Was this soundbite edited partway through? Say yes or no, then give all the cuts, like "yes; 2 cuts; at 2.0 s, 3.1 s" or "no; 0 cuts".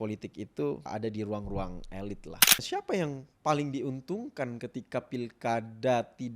yes; 1 cut; at 2.6 s